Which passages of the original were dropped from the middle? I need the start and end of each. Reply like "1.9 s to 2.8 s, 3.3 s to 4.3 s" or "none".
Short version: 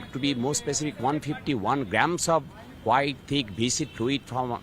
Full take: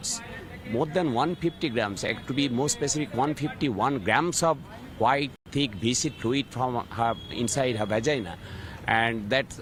5.3 s to 5.4 s